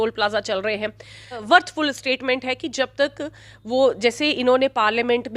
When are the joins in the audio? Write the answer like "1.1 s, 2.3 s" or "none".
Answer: 1.4 s